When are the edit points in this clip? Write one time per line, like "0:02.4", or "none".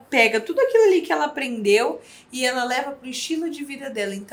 none